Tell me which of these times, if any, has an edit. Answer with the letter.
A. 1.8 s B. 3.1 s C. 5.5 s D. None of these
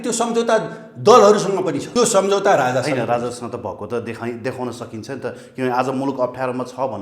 A